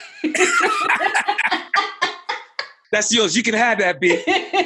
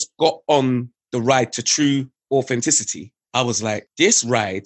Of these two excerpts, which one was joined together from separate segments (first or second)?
second